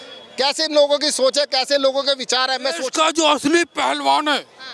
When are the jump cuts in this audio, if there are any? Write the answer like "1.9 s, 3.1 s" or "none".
2.8 s